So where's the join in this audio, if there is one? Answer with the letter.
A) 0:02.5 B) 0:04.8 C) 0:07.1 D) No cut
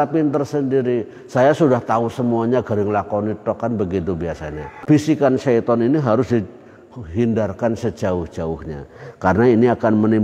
B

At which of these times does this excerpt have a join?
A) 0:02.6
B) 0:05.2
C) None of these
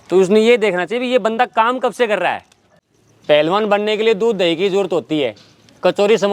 A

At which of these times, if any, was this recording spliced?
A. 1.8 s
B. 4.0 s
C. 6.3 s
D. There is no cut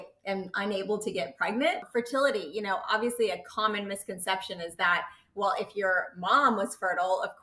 A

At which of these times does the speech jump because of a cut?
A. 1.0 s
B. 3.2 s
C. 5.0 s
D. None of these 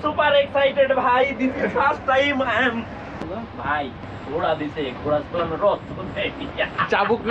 B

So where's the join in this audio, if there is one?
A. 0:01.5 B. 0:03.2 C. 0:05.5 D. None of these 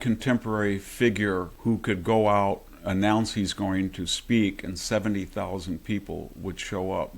A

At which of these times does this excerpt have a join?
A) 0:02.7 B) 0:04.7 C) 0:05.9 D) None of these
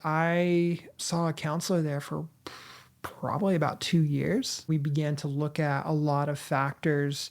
B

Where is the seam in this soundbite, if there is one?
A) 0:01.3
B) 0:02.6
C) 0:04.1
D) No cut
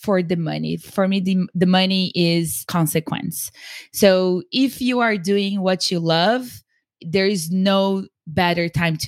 B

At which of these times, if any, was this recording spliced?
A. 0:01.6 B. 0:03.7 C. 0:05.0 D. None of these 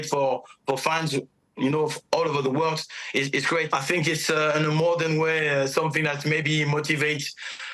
B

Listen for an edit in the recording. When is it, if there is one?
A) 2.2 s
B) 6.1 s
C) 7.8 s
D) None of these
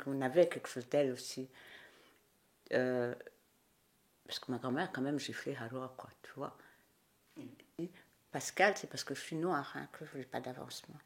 C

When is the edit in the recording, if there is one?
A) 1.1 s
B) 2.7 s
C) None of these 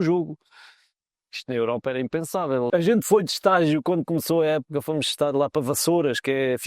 B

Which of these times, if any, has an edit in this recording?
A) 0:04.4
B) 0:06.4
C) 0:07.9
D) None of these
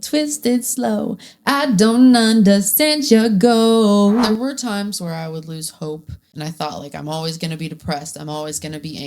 A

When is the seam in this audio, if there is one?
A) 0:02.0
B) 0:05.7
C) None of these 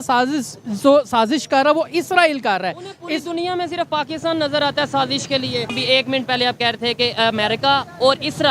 B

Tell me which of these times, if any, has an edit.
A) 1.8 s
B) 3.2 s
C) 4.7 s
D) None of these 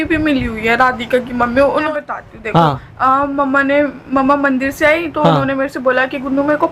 A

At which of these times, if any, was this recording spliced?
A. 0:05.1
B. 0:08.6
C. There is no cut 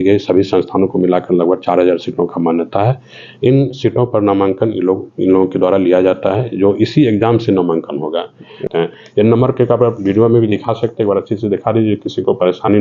B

